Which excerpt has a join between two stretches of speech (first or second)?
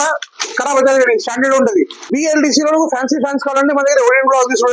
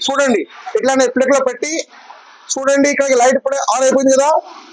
first